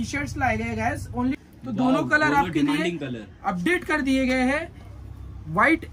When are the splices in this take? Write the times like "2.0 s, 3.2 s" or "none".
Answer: 1.4 s